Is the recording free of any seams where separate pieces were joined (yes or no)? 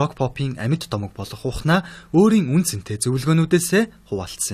yes